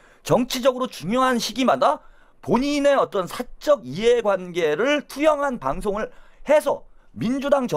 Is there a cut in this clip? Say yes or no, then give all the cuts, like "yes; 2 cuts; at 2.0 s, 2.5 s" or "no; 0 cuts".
no; 0 cuts